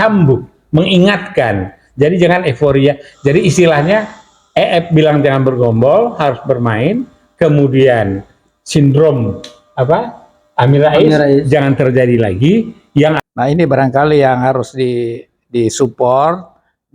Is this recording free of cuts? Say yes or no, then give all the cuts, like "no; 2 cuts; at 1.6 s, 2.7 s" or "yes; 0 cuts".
no; 1 cut; at 13.2 s